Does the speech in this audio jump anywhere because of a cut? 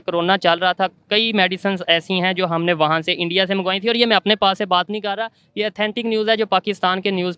no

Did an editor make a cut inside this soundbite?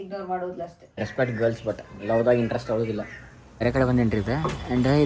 yes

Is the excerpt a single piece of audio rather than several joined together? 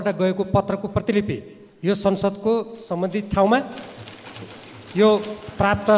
yes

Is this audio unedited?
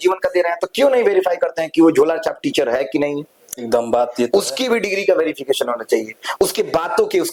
yes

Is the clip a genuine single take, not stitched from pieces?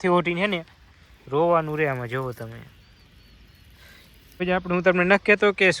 no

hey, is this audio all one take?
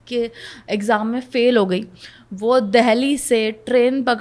yes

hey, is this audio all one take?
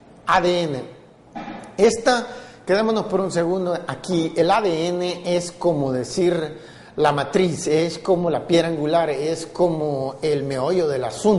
yes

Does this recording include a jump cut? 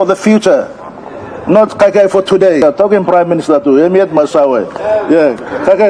yes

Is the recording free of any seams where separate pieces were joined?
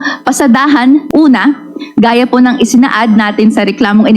no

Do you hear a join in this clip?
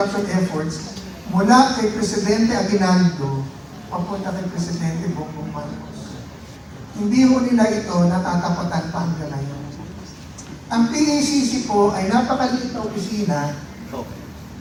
no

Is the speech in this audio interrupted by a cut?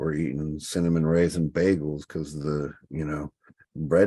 no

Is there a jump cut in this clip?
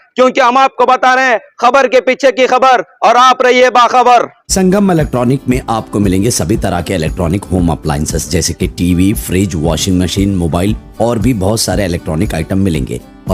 no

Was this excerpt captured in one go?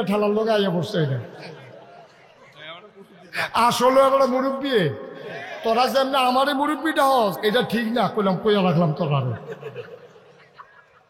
no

